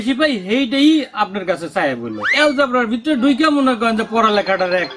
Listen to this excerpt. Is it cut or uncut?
cut